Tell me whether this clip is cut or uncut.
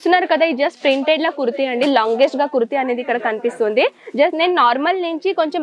uncut